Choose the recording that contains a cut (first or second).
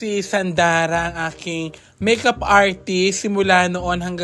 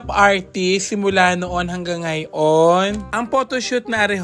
second